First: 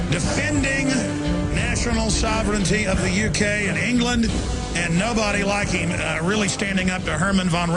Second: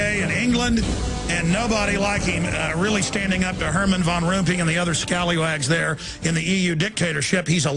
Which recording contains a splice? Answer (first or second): second